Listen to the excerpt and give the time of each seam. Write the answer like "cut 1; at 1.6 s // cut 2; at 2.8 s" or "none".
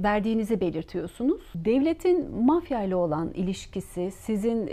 cut 1; at 1.5 s